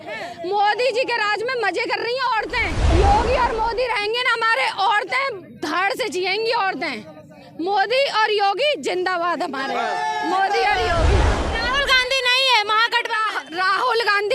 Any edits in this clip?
yes; 2 cuts; at 2.8 s, 11.4 s

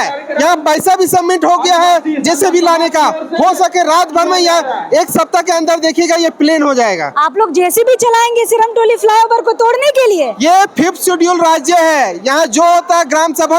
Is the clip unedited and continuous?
yes; 0 cuts

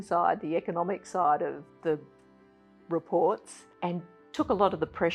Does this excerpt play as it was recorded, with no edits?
yes; 0 cuts

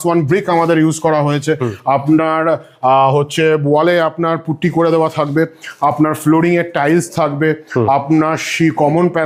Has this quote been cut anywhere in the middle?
no; 0 cuts

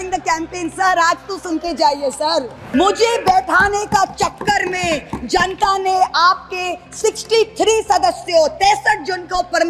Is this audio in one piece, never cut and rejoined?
no; 1 cut; at 2.6 s

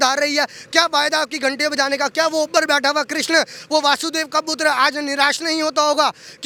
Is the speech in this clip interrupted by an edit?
no; 0 cuts

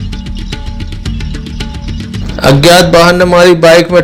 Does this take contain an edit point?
no; 0 cuts

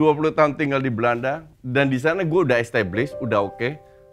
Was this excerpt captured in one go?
yes; 0 cuts

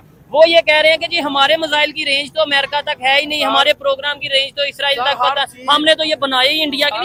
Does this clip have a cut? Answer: no; 0 cuts

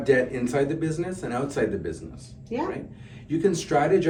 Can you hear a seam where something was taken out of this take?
no; 0 cuts

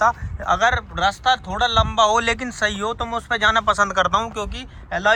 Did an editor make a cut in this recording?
no; 0 cuts

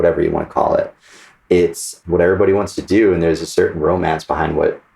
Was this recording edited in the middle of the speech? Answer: yes; 1 cut; at 1.9 s

